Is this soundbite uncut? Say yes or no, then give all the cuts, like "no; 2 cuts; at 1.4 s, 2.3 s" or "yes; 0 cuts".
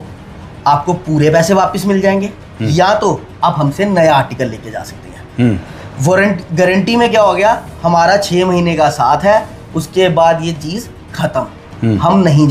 yes; 0 cuts